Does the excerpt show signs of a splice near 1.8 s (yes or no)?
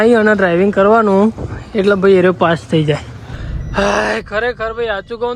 no